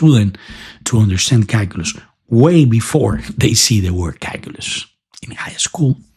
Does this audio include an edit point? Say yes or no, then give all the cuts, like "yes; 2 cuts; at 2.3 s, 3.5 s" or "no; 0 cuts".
no; 0 cuts